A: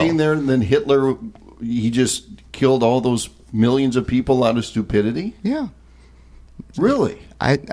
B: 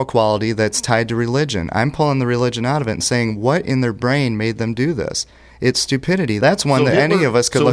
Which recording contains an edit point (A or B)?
B